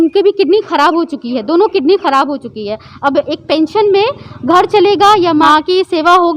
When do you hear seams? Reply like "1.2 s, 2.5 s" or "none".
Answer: 5.5 s

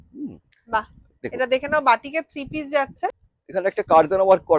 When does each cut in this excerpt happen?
3.0 s

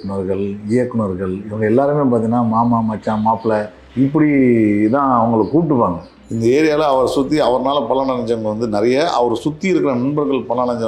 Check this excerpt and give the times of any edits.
3.8 s, 6.1 s

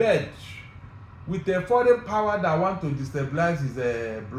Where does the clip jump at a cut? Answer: none

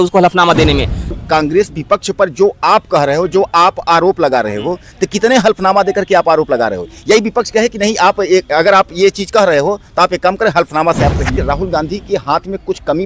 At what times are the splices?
1.1 s, 11.3 s

